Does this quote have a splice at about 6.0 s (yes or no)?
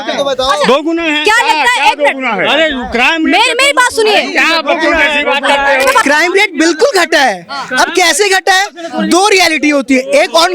yes